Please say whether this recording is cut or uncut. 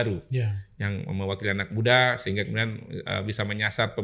uncut